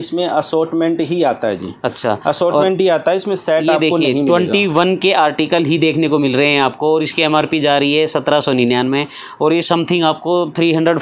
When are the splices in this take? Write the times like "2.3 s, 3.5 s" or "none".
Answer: none